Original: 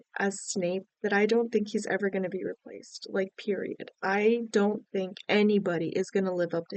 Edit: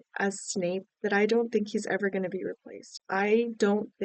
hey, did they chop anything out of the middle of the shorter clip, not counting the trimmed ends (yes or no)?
yes